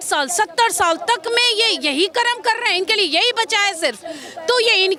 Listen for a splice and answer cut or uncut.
uncut